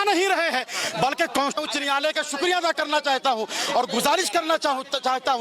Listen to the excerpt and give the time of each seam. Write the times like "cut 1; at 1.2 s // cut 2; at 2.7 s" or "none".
cut 1; at 1.6 s